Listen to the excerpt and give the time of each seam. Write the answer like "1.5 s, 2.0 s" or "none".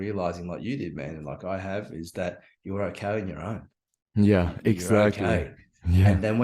none